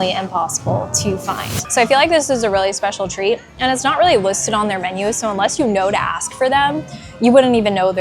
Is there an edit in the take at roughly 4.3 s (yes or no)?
no